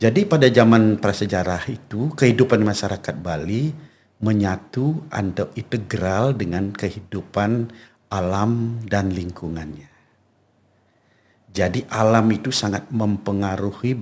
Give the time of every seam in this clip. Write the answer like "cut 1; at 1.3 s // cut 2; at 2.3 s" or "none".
none